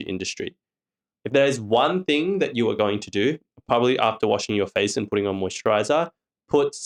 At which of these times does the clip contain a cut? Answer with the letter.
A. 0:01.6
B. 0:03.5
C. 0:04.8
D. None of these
D